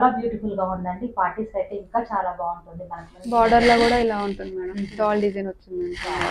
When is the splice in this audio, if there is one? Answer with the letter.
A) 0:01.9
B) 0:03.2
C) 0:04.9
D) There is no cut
B